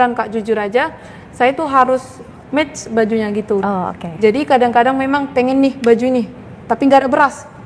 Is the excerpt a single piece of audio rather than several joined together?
yes; 0 cuts

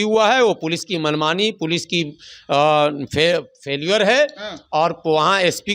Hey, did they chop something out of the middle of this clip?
no; 0 cuts

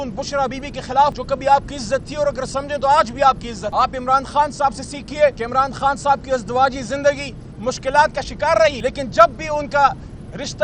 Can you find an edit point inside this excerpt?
yes; 4 cuts; at 1.2 s, 3.6 s, 5.4 s, 8.8 s

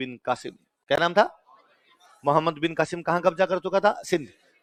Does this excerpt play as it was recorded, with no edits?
yes; 0 cuts

